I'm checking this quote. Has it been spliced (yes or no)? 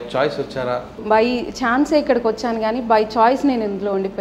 yes